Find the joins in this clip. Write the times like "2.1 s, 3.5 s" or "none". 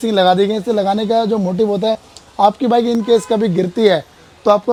none